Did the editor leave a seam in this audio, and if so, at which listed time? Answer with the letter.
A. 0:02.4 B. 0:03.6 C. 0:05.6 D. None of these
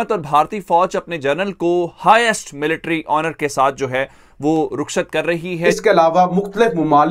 C